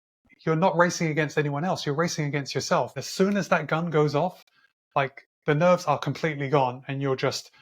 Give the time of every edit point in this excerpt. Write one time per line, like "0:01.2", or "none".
0:03.0